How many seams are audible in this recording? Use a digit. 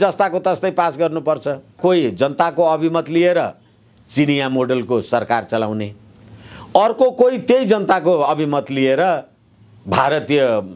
1